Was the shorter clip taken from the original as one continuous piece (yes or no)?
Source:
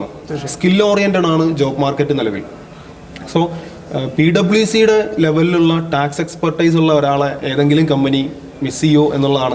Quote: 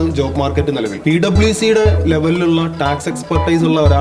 no